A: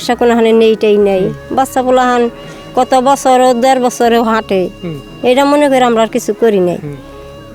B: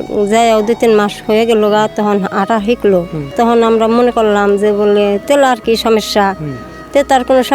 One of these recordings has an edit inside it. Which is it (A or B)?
B